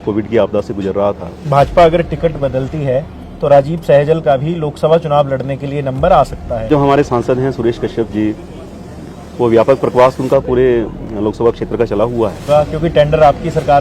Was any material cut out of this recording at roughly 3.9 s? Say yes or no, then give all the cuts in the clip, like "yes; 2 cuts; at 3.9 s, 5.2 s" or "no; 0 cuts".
no; 3 cuts; at 1.4 s, 6.7 s, 12.4 s